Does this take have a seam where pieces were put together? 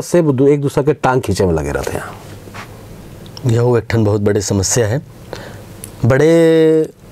no; 0 cuts

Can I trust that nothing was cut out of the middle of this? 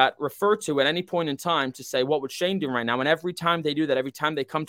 yes; 0 cuts

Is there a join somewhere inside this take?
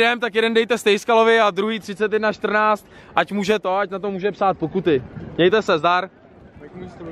no; 0 cuts

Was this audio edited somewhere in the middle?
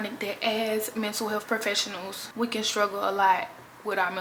no; 0 cuts

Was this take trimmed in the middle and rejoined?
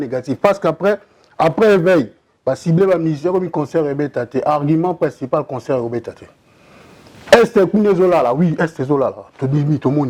no; 0 cuts

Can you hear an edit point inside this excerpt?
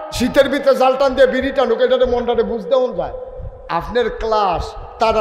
no; 0 cuts

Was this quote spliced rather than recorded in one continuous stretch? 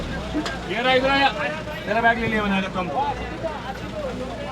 no; 0 cuts

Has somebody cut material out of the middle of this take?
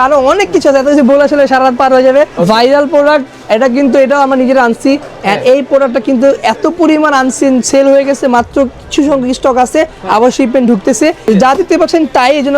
yes; 2 cuts; at 2.3 s, 11.2 s

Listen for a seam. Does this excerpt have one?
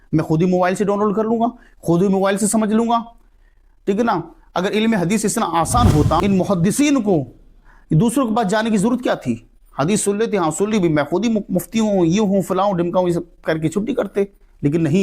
yes; 1 cut; at 6.2 s

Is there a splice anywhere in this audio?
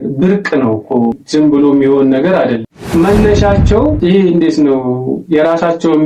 yes; 1 cut; at 2.7 s

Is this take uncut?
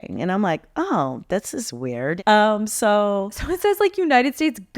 no; 1 cut; at 2.2 s

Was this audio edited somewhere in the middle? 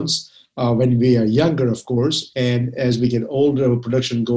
no; 0 cuts

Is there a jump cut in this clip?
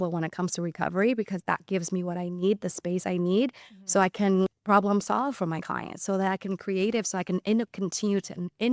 no; 0 cuts

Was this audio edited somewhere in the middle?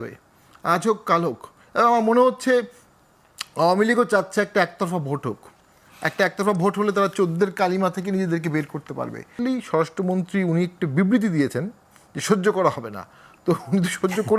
yes; 1 cut; at 9.3 s

